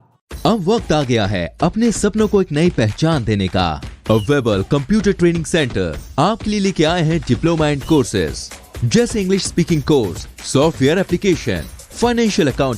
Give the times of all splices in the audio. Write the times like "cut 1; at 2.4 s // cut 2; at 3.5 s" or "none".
none